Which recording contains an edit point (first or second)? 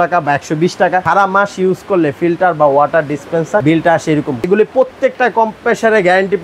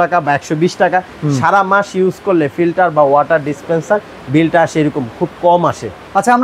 first